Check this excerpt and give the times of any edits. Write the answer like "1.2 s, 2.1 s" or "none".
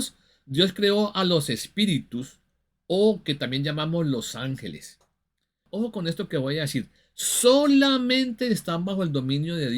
5.7 s